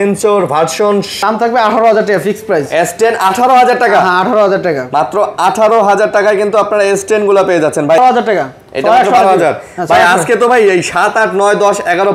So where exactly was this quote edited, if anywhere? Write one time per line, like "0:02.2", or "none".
0:01.1
0:08.0